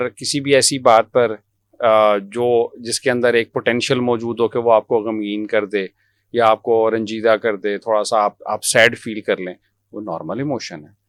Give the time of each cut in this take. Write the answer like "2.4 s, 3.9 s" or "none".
none

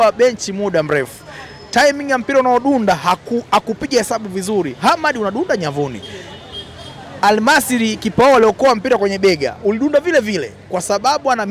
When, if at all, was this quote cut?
none

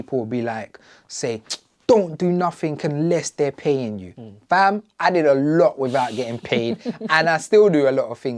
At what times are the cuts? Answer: none

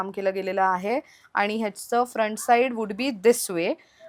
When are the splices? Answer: none

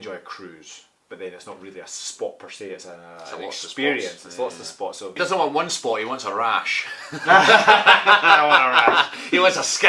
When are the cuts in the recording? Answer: 5.2 s

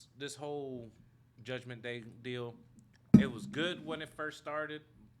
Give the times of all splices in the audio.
none

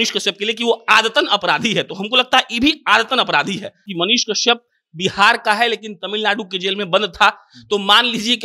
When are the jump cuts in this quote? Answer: 3.9 s

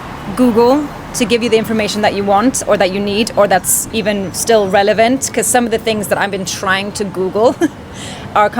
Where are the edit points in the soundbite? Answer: none

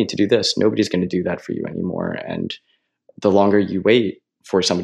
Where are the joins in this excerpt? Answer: none

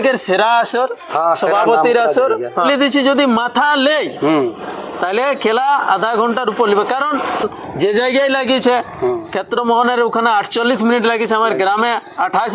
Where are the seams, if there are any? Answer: 2.7 s, 7.5 s

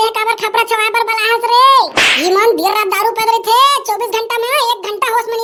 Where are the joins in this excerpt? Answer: none

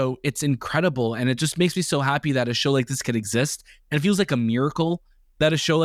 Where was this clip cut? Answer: none

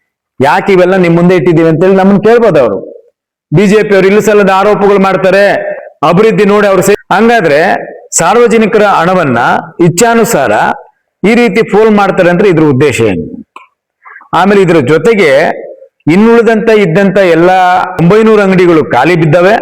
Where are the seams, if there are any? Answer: 6.9 s, 18.0 s

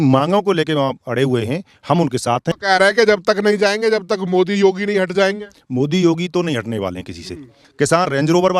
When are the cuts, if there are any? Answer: 2.5 s, 7.6 s

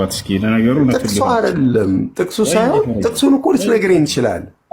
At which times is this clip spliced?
2.1 s

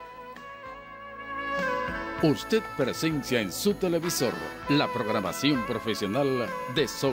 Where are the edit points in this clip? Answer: none

